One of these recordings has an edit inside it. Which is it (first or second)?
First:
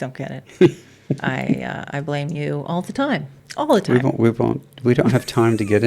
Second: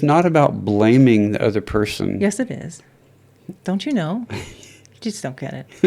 first